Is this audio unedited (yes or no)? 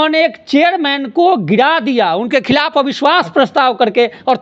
yes